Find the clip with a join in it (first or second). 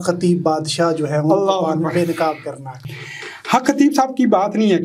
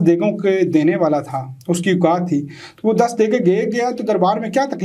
first